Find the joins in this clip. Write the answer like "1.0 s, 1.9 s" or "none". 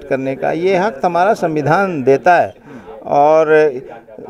none

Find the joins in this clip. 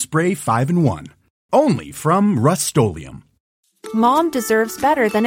3.6 s

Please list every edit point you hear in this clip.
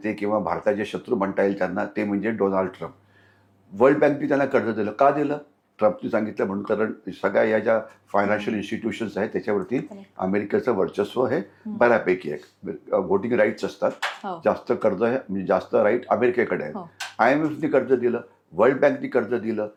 none

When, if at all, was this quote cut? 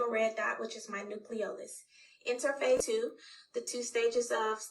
2.8 s

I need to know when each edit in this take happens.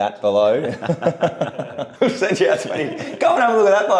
1.8 s

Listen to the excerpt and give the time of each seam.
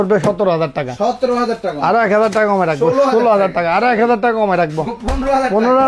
none

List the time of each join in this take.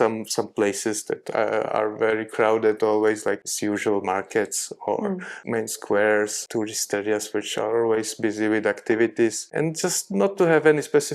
3.4 s, 5.3 s, 6.4 s, 9.4 s

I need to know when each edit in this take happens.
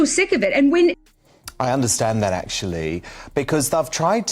1.0 s

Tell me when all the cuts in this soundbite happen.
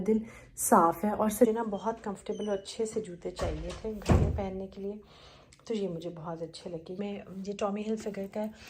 1.5 s, 7.0 s

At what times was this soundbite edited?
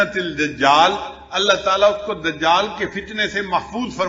none

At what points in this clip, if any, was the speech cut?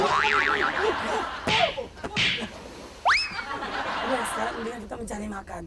none

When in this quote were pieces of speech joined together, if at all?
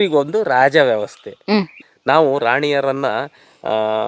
1.8 s

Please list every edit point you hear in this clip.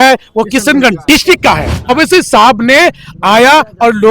1.9 s

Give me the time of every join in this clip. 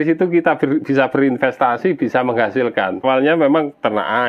3.0 s

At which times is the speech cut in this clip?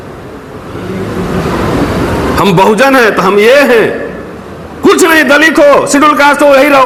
none

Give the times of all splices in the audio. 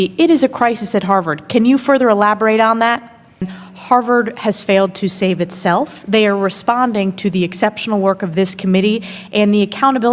3.5 s

